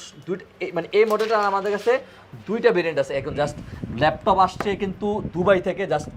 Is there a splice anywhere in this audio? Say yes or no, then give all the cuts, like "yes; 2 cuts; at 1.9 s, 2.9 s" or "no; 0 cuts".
no; 0 cuts